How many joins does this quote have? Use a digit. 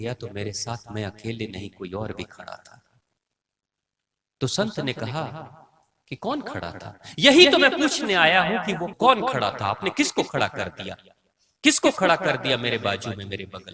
1